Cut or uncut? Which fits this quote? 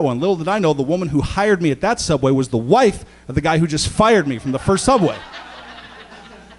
uncut